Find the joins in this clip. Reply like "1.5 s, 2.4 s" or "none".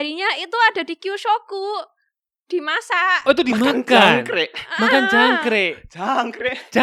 none